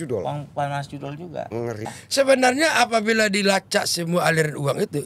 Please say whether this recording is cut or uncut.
cut